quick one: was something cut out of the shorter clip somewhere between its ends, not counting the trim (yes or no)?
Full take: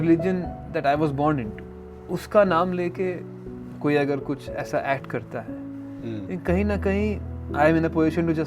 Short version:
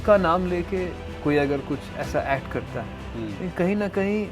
yes